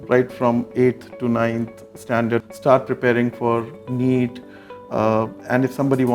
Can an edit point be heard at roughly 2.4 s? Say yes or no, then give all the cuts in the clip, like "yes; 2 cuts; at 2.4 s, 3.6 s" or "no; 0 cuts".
yes; 1 cut; at 2.4 s